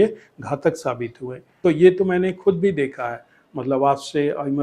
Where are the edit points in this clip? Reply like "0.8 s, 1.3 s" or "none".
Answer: 1.5 s